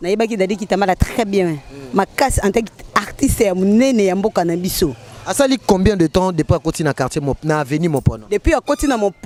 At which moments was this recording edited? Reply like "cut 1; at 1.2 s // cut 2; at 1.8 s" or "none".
none